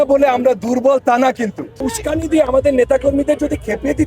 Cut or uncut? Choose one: cut